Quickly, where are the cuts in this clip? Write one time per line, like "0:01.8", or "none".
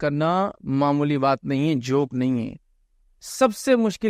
none